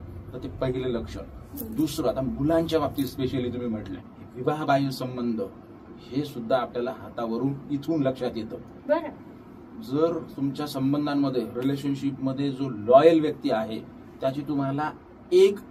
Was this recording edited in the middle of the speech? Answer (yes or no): yes